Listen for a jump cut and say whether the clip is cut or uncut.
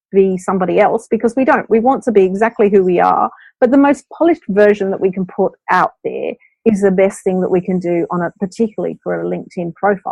uncut